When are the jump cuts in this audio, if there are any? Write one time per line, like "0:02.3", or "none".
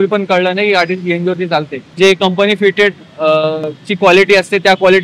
0:01.9

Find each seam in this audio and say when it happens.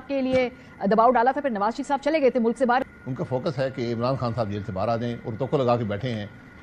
0:02.8

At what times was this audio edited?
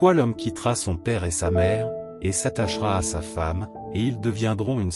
none

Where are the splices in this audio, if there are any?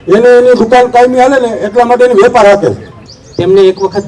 0:02.9

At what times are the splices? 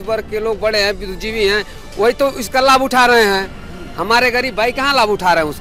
none

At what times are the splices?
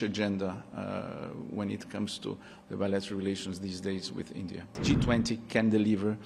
0:04.7

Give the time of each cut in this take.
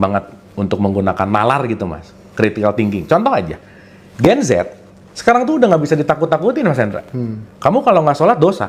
none

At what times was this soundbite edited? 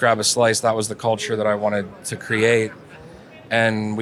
none

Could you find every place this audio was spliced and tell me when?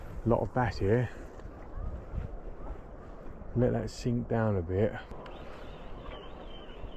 0:05.1

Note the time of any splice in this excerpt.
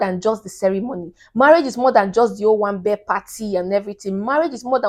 none

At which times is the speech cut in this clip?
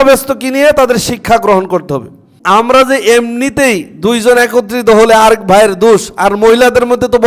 0:02.3

